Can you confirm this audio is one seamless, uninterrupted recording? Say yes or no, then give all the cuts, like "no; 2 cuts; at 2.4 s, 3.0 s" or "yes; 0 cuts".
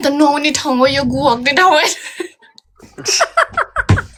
yes; 0 cuts